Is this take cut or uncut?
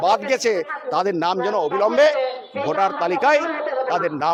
uncut